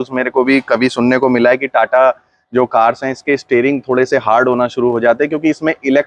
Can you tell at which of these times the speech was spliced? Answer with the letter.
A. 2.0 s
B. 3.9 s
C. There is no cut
C